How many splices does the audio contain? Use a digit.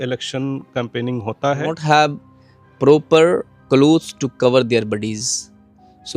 1